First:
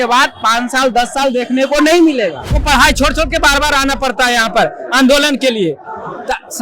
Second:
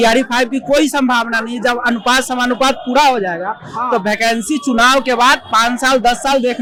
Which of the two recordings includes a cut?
first; 1 cut; at 2.6 s

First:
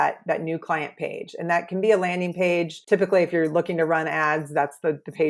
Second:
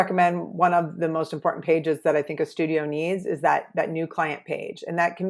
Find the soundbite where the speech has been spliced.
first; 1 cut; at 2.8 s

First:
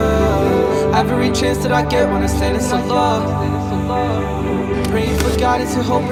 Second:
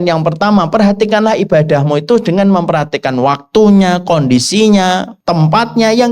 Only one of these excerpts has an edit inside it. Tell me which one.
second; 1 cut; at 5.1 s

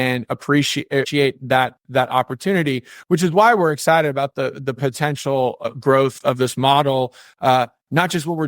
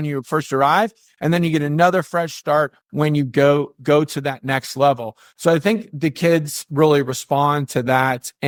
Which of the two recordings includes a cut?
first; 2 cuts; at 1.1 s, 5.7 s

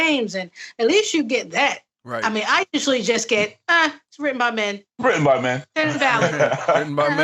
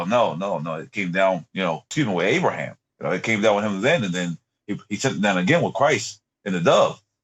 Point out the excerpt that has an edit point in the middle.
second; 1 cut; at 1.9 s

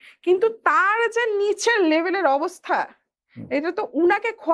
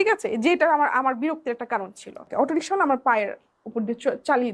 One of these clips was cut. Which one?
second; 1 cut; at 2.2 s

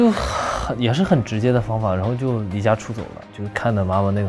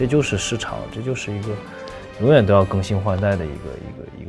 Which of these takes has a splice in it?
first; 1 cut; at 3.3 s

